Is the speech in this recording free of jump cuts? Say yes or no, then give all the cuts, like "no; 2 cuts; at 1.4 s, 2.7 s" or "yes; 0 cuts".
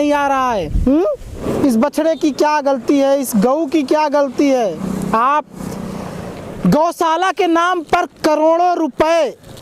no; 1 cut; at 1.4 s